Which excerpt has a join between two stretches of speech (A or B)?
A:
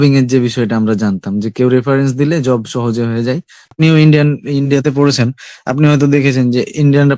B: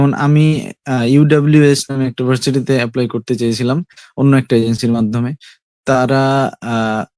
A